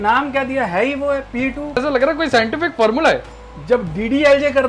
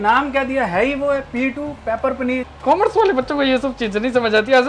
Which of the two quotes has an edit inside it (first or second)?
first